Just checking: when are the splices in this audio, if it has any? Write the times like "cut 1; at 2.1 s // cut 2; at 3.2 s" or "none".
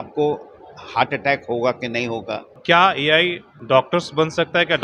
cut 1; at 2.4 s // cut 2; at 3.5 s